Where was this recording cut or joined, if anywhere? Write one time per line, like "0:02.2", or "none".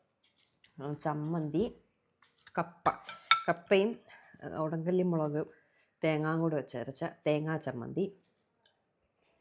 none

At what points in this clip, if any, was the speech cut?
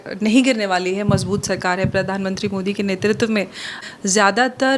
0:03.8

